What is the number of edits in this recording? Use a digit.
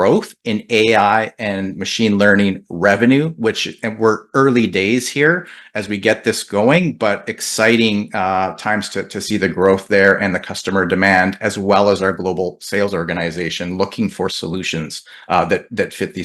0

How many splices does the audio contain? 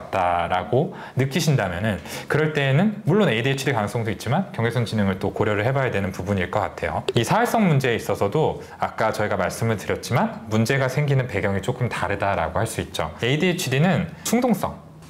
0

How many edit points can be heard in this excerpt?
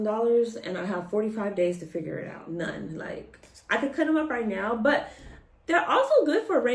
1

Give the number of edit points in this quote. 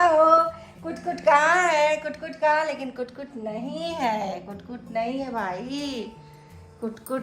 0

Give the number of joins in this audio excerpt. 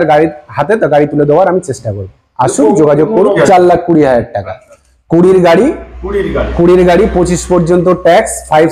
1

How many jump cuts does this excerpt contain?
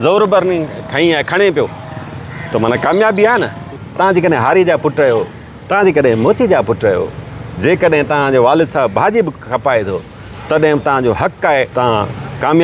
2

